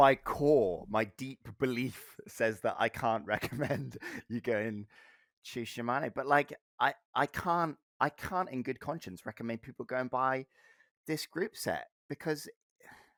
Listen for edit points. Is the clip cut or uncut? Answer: uncut